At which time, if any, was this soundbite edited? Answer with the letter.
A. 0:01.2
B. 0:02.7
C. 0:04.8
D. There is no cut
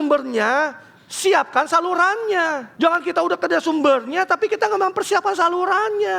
B